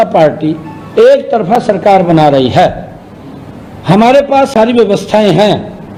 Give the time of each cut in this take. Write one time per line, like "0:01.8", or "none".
none